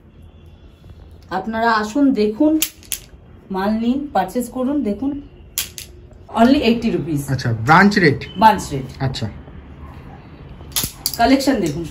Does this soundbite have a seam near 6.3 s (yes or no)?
yes